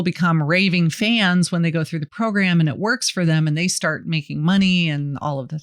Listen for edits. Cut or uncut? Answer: uncut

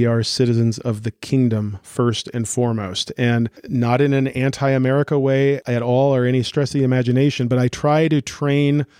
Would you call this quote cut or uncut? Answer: cut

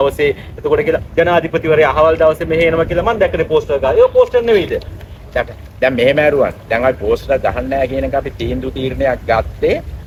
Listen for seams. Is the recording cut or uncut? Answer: uncut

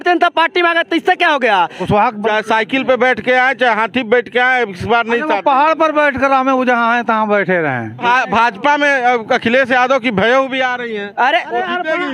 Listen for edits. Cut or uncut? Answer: cut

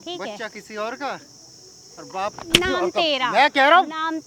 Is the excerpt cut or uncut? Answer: uncut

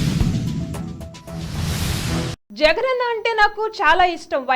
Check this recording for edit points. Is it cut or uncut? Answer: cut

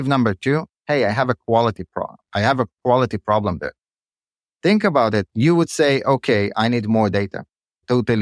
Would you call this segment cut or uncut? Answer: uncut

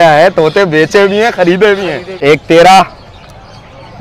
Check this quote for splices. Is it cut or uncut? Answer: cut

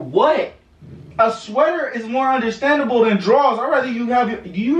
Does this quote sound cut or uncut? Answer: uncut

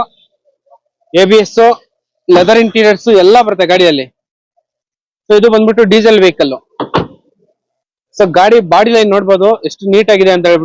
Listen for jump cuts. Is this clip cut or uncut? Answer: uncut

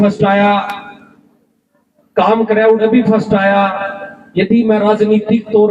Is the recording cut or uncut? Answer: uncut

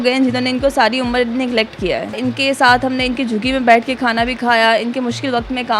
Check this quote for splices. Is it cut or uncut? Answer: cut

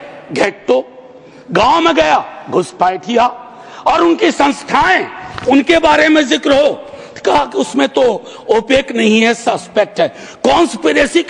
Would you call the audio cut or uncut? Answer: uncut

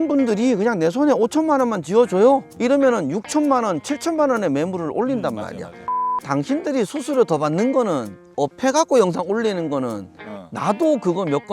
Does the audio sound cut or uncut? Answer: cut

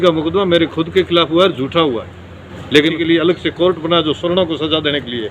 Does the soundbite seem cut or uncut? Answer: cut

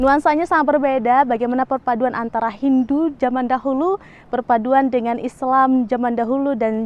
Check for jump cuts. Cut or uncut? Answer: uncut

